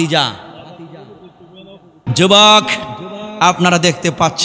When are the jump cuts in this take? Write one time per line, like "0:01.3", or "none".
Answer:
0:02.0